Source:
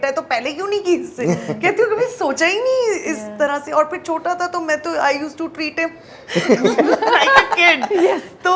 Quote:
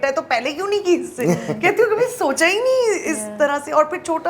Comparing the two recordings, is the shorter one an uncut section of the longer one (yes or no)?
yes